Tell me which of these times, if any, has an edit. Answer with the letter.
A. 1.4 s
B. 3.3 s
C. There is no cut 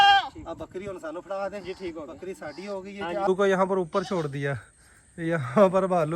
B